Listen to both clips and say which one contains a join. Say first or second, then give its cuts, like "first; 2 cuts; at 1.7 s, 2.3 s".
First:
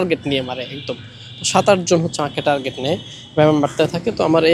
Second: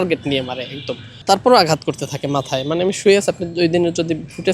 second; 1 cut; at 1.2 s